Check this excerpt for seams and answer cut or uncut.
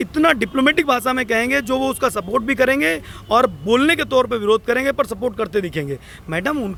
uncut